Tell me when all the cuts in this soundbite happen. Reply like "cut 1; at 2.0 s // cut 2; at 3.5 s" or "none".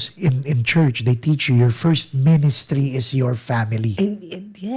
none

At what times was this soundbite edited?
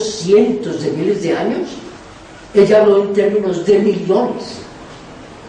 cut 1; at 1.5 s

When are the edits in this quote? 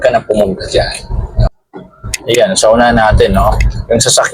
cut 1; at 1.4 s

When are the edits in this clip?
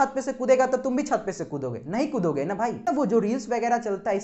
cut 1; at 2.8 s

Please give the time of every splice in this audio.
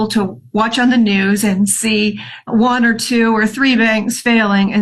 cut 1; at 2.3 s

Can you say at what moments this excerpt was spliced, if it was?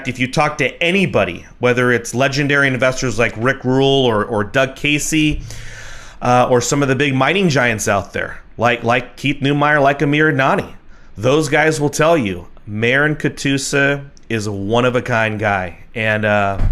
none

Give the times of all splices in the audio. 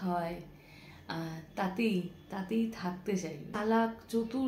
cut 1; at 3.6 s

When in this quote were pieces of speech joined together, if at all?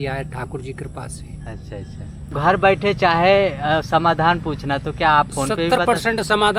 cut 1; at 2.4 s

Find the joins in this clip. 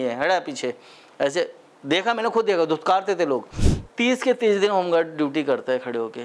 cut 1; at 3.5 s

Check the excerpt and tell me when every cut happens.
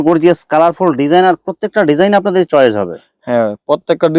none

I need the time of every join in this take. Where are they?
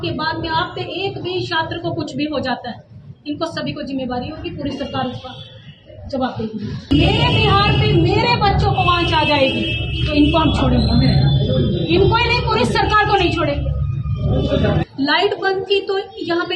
cut 1; at 6.9 s // cut 2; at 14.9 s

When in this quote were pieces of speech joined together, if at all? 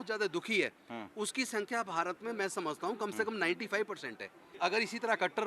cut 1; at 4.4 s

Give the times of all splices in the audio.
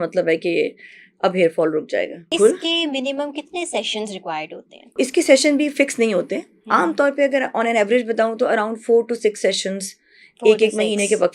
cut 1; at 2.3 s // cut 2; at 5.0 s

